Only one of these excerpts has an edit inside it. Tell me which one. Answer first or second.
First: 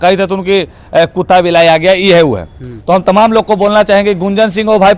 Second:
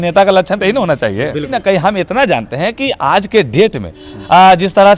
second